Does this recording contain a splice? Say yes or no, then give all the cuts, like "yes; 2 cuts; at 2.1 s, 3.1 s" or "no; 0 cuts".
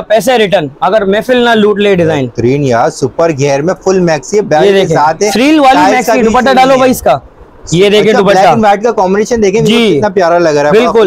no; 0 cuts